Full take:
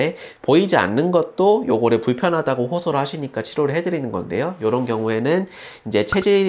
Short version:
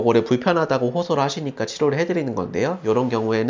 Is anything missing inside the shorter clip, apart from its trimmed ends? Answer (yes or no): no